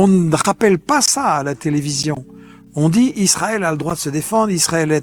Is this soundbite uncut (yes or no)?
yes